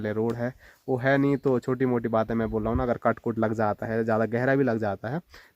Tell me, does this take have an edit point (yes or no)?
no